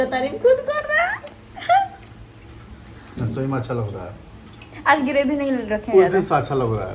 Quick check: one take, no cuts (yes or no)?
no